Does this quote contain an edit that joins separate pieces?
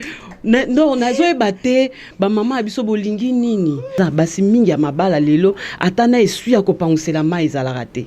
yes; 1 cut; at 4.0 s

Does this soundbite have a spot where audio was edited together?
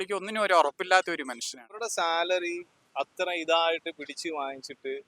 yes; 1 cut; at 1.8 s

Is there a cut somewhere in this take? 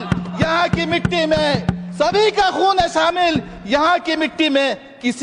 no; 0 cuts

